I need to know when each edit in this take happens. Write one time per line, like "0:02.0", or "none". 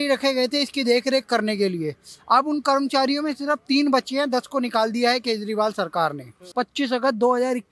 0:06.4